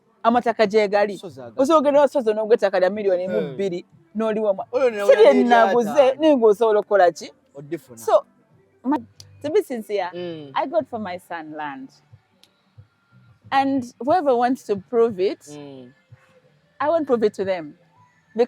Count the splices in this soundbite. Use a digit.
1